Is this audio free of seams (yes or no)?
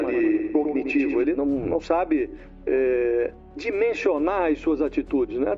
yes